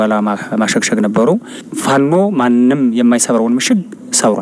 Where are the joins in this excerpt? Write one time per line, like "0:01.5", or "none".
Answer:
0:01.7

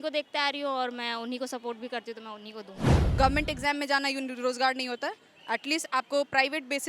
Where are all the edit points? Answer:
0:02.9

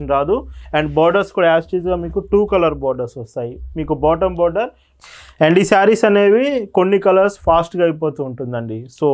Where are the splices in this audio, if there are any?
0:04.8

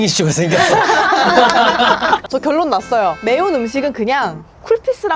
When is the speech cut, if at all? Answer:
0:02.2
0:03.2

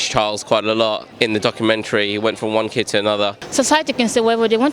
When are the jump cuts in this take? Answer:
0:01.1
0:03.4

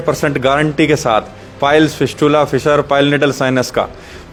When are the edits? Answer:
none

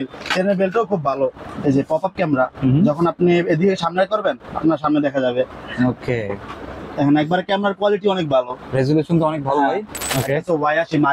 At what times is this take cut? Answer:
0:01.4
0:10.1

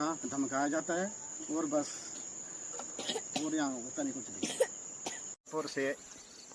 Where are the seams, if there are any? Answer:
0:05.5

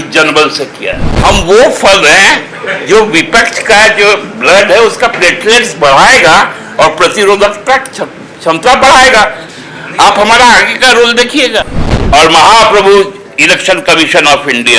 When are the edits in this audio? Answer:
0:01.1
0:11.8

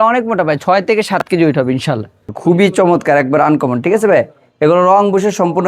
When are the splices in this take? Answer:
0:02.3

